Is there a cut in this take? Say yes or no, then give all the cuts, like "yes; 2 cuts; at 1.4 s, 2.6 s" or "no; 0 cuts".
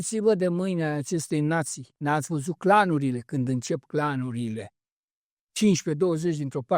yes; 1 cut; at 1.9 s